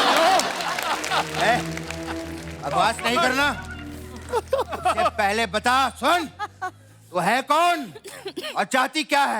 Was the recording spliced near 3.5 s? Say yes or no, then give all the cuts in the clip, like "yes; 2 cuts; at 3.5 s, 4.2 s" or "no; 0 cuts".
no; 1 cut; at 1.3 s